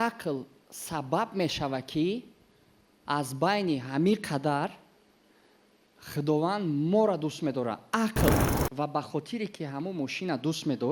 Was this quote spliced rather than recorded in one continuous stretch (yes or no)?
yes